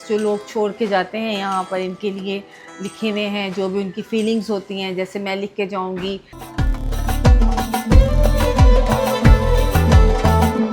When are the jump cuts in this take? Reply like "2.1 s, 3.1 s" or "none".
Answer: none